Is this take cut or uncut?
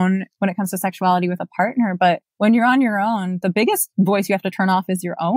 cut